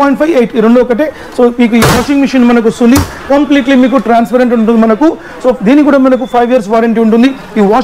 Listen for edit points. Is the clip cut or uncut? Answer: uncut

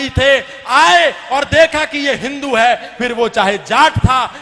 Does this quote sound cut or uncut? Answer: uncut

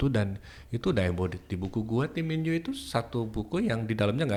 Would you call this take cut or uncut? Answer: uncut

